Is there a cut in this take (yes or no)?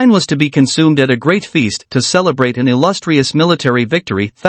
yes